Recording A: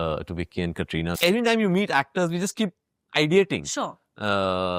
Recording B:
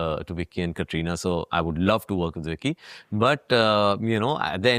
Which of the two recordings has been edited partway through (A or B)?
A